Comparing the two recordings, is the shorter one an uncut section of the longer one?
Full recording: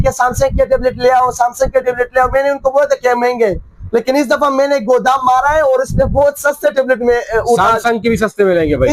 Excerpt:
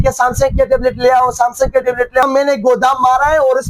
no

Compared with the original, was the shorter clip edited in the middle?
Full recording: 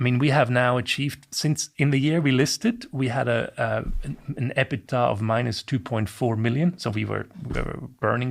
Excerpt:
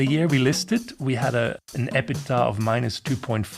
yes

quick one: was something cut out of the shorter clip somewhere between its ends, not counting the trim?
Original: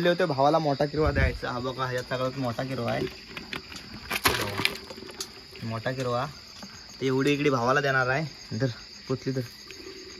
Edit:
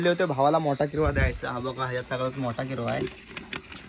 no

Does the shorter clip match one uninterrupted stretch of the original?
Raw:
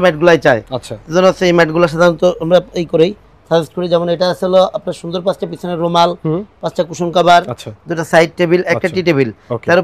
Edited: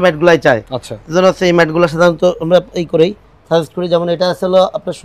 yes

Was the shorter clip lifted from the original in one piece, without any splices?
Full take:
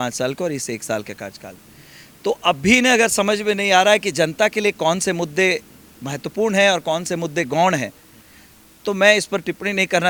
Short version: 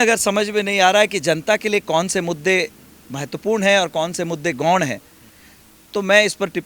yes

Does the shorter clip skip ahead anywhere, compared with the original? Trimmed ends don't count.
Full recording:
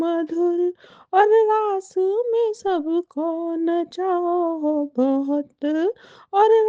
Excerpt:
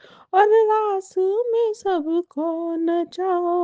no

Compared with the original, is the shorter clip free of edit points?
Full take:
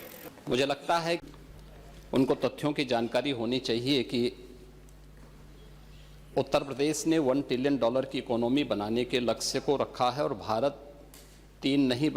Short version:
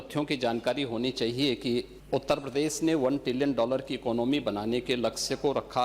no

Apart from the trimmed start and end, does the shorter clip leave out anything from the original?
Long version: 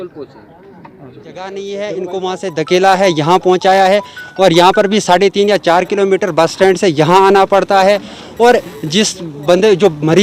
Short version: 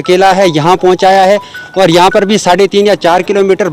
no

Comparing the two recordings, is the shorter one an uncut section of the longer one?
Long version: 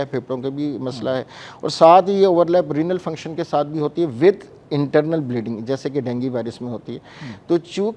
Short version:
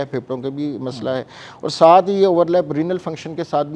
yes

